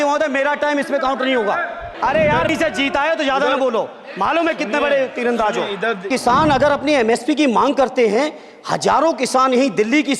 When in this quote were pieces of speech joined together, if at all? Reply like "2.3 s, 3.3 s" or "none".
1.9 s, 6.1 s